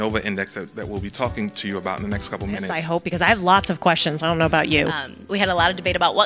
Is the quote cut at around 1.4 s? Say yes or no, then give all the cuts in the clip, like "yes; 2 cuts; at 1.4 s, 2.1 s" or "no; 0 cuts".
no; 2 cuts; at 2.8 s, 5.1 s